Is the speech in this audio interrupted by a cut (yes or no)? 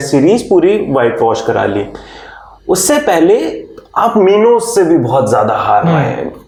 no